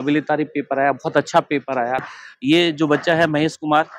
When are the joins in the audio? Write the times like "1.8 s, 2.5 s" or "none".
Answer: 2.1 s